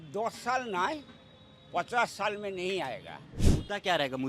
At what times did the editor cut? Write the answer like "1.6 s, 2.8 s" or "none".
3.4 s